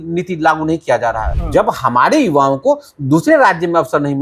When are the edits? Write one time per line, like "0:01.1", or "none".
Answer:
0:01.3